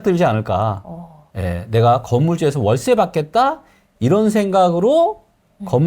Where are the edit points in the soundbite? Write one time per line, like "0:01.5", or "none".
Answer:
0:01.2